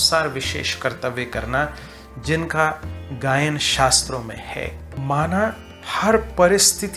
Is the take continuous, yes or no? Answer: yes